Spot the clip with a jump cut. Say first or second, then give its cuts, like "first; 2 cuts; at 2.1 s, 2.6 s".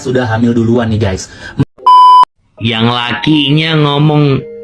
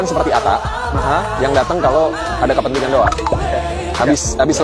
first; 2 cuts; at 1.6 s, 2.4 s